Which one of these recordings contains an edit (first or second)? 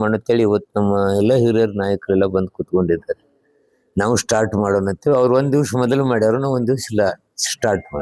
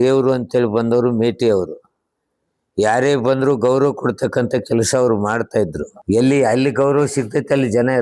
second